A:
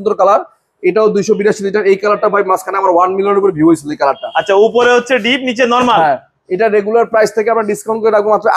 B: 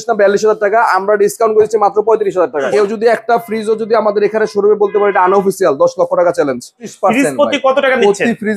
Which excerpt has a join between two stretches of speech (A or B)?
B